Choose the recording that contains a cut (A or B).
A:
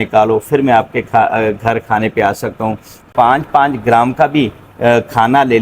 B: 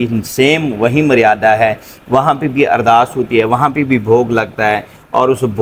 A